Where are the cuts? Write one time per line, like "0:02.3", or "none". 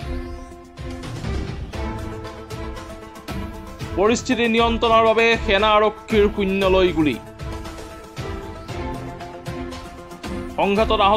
none

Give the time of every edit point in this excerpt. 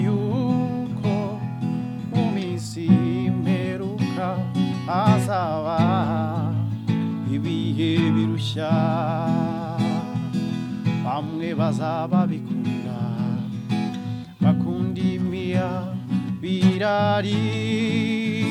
none

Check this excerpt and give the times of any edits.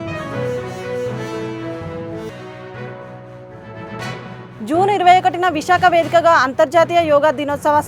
0:02.3

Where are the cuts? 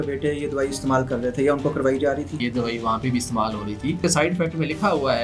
0:02.4
0:04.0

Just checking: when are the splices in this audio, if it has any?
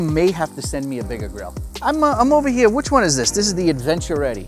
0:01.7

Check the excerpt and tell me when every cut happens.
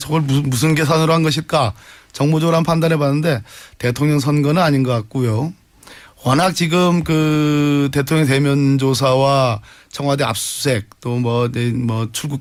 none

